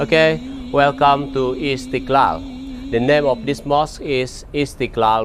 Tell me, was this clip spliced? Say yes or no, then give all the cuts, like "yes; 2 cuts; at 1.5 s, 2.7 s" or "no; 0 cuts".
no; 0 cuts